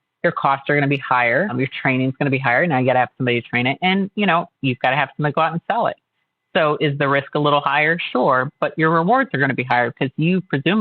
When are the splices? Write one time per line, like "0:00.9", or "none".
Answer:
0:01.5